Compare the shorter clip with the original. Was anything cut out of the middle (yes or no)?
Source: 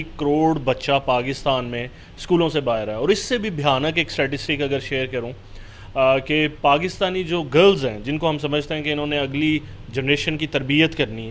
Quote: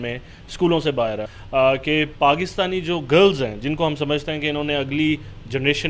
yes